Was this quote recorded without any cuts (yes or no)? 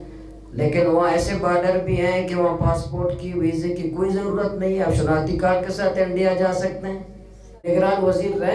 no